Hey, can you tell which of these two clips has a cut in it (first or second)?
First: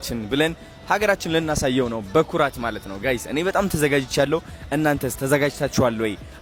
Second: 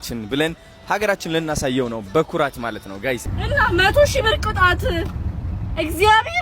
second